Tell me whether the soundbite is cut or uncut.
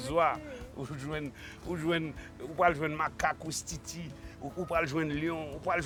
uncut